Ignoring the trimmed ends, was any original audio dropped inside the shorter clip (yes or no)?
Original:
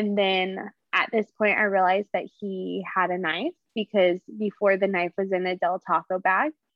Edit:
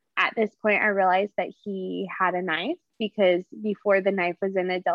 no